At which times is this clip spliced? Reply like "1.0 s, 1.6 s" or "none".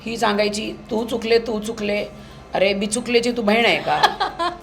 none